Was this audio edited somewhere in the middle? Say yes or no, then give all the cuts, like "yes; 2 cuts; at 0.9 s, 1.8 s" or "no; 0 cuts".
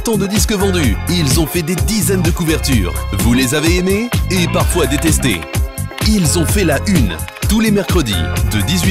no; 0 cuts